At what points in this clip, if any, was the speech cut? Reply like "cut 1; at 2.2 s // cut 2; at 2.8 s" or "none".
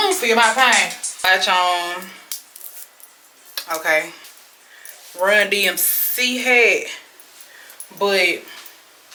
none